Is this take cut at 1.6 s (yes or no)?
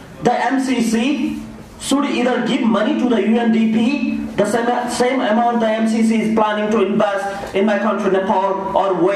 no